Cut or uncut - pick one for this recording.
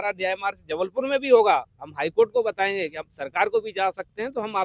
uncut